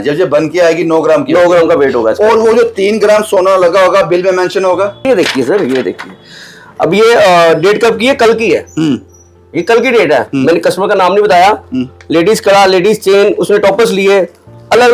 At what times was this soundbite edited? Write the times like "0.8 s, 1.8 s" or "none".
none